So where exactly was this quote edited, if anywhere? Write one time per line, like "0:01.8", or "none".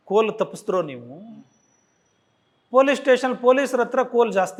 none